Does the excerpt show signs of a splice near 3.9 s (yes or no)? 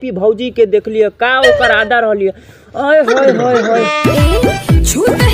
yes